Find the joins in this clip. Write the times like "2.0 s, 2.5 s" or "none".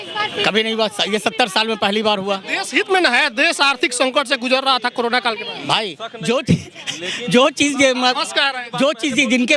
none